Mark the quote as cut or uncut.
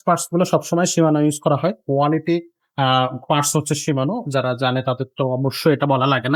uncut